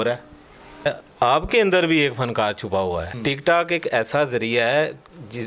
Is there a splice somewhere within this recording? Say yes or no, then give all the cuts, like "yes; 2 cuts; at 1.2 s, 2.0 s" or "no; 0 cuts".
yes; 2 cuts; at 0.8 s, 3.1 s